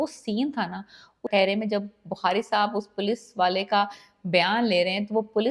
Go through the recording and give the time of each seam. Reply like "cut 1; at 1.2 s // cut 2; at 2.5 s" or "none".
cut 1; at 1.3 s

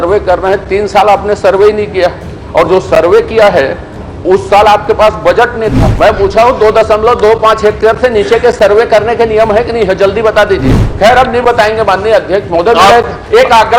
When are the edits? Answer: cut 1; at 5.8 s // cut 2; at 10.8 s

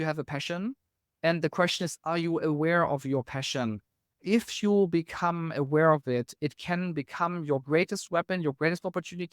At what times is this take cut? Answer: cut 1; at 4.1 s

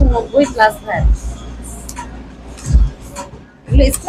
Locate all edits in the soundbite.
none

